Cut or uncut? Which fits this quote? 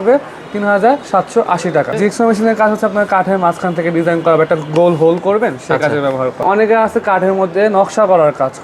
cut